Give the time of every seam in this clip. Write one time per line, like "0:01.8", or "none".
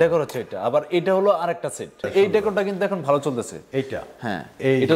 0:02.1